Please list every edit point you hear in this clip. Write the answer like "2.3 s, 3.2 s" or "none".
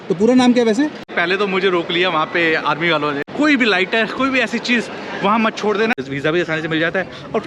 1.1 s, 3.2 s, 6.0 s